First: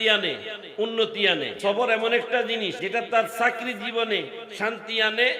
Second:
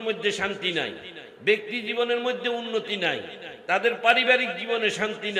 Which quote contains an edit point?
first; 2 cuts; at 1.5 s, 2.8 s

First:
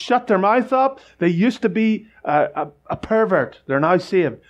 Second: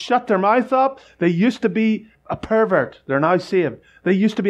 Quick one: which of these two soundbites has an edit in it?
second; 1 cut; at 2.1 s

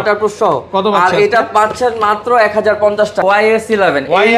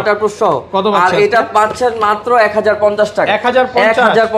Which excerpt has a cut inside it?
first; 1 cut; at 3.3 s

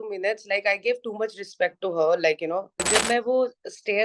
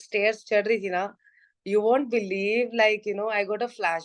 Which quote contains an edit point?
first; 1 cut; at 2.8 s

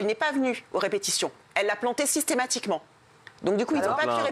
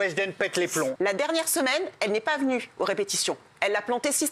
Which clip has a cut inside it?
second; 1 cut; at 0.9 s

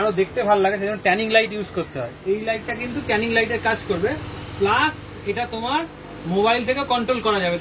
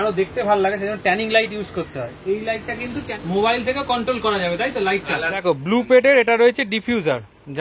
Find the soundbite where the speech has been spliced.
second; 2 cuts; at 3.1 s, 5.3 s

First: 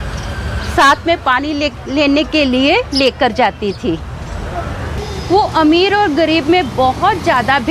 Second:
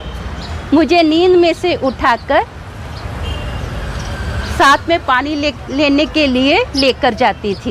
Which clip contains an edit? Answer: first; 1 cut; at 5.0 s

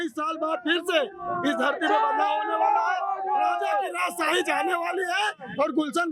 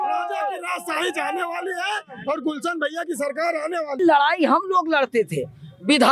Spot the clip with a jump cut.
second; 1 cut; at 4.0 s

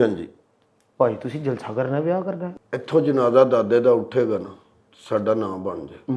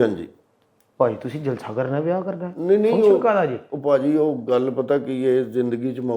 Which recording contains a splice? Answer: first; 1 cut; at 2.5 s

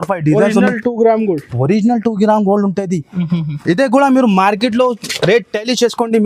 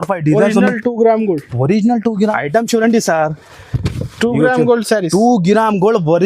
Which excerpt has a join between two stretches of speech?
second; 1 cut; at 2.3 s

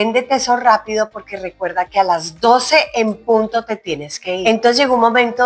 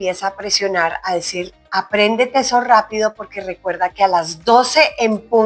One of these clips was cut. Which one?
first; 1 cut; at 4.4 s

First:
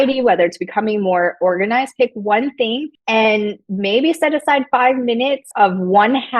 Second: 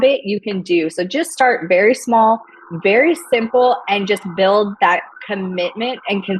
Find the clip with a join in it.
first; 3 cuts; at 2.9 s, 3.6 s, 5.5 s

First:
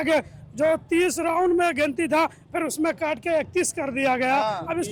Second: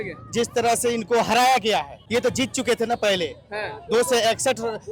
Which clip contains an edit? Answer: second; 1 cut; at 2.0 s

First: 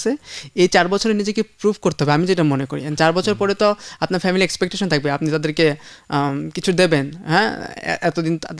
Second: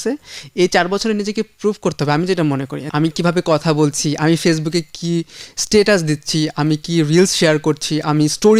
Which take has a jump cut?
second; 1 cut; at 2.9 s

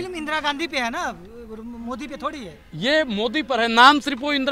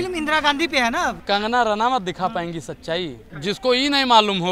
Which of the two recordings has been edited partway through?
second; 2 cuts; at 1.2 s, 3.3 s

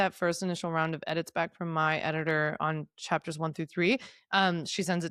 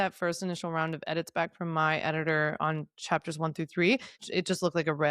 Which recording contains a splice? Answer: second; 1 cut; at 4.2 s

